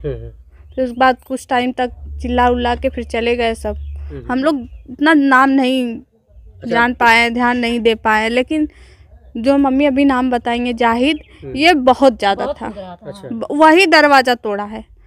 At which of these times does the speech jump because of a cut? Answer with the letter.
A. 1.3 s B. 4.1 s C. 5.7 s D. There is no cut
B